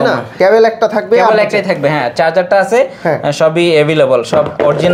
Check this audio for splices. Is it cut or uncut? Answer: uncut